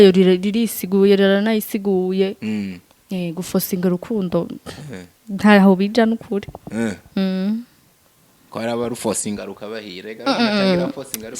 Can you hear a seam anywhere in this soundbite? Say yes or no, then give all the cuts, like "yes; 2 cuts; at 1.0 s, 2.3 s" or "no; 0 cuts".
no; 0 cuts